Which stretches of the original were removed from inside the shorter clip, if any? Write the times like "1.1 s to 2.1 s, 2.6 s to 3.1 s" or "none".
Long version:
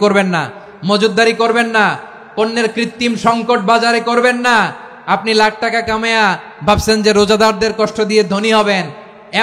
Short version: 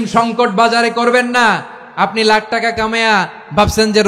none